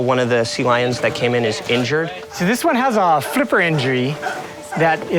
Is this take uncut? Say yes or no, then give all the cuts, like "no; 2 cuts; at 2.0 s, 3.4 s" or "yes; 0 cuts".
no; 1 cut; at 2.2 s